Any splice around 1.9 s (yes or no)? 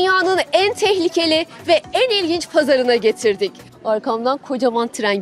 no